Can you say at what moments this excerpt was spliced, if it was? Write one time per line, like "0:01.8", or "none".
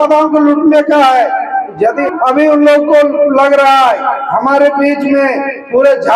0:02.0